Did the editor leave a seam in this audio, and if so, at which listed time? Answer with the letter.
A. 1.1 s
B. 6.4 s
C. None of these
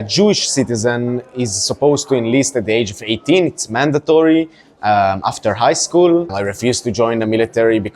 B